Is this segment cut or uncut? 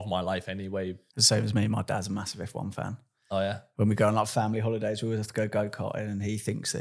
cut